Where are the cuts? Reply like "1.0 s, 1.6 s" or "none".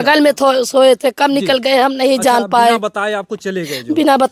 none